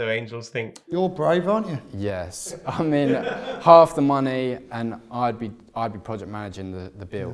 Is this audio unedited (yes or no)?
yes